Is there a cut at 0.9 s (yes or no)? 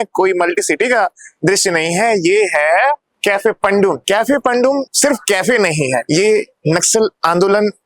no